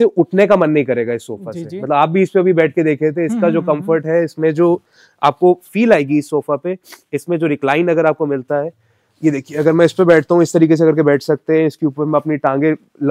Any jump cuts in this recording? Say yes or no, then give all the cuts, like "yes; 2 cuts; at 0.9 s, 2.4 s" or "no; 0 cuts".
no; 0 cuts